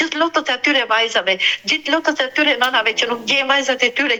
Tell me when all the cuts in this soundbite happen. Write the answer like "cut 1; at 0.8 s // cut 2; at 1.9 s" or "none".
none